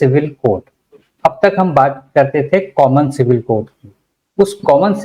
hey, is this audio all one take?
yes; 0 cuts

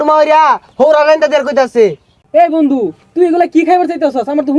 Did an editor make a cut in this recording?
no; 0 cuts

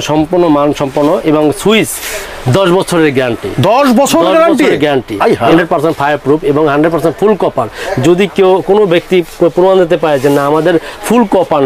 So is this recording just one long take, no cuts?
no; 1 cut; at 5.5 s

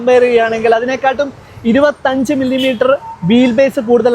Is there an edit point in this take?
no; 0 cuts

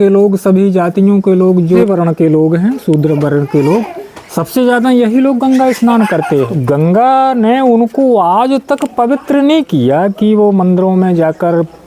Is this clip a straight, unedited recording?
no; 2 cuts; at 1.8 s, 6.5 s

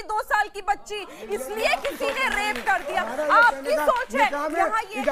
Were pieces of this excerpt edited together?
no; 0 cuts

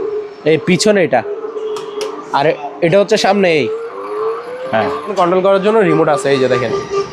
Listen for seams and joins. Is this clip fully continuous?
no; 1 cut; at 5.1 s

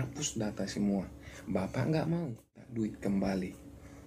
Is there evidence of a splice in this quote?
yes; 1 cut; at 2.7 s

